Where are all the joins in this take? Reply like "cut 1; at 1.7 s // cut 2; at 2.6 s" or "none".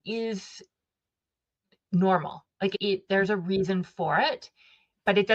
cut 1; at 2.7 s